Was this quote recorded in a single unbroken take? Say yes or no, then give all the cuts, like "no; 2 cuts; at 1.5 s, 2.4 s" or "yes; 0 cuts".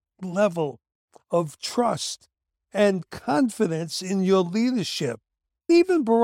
yes; 0 cuts